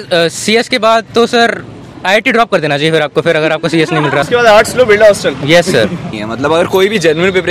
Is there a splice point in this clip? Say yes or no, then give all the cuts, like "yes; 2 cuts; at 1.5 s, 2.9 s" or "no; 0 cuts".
yes; 2 cuts; at 4.2 s, 6.2 s